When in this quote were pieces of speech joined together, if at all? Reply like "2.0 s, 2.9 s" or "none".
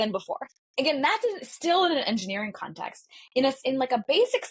none

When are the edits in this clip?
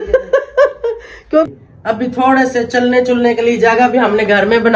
1.5 s

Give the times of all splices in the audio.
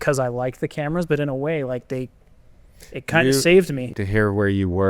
3.9 s

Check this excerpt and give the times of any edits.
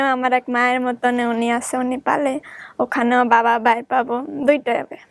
none

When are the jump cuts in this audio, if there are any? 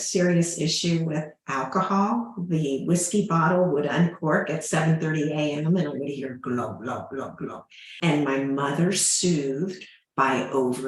7.9 s

